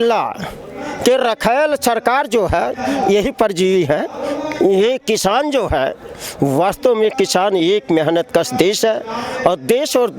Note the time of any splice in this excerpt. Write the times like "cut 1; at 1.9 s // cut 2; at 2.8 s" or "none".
none